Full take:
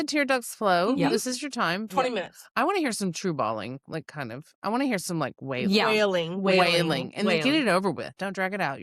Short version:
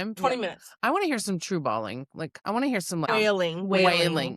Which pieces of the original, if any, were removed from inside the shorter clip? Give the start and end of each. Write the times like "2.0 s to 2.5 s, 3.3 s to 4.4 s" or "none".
4.0 s to 4.5 s, 5.3 s to 5.8 s